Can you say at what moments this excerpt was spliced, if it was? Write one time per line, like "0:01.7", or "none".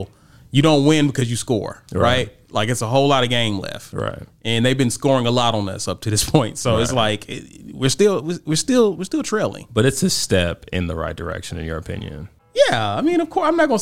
0:12.3